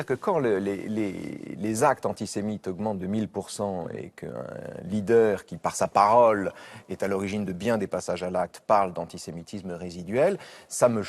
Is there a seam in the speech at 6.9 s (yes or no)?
no